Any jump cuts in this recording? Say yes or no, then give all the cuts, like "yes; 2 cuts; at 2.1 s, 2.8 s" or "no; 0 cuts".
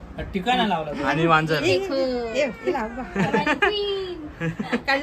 no; 0 cuts